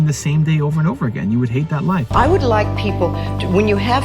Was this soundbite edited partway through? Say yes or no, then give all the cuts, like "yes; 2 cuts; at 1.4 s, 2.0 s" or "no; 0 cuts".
yes; 1 cut; at 2.1 s